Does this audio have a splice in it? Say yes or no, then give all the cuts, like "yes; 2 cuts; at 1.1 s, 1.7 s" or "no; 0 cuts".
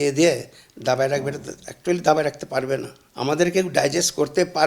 no; 0 cuts